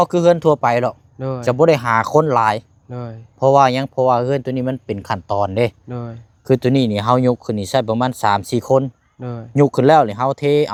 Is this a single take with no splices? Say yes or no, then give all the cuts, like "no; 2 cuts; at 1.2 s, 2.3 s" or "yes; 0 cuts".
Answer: yes; 0 cuts